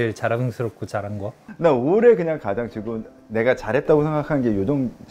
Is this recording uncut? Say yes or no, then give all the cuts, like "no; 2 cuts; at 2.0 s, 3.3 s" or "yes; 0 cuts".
yes; 0 cuts